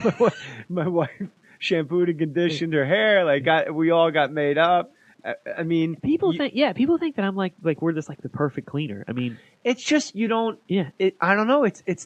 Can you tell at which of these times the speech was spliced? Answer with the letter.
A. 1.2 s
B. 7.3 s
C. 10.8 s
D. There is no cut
A